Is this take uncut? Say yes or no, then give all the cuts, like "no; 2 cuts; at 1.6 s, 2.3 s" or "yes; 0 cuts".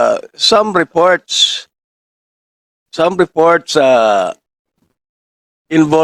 yes; 0 cuts